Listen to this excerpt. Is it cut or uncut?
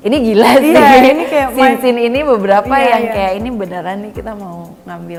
uncut